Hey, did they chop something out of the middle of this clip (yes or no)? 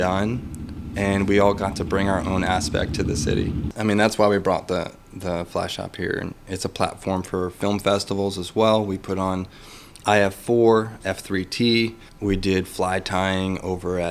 yes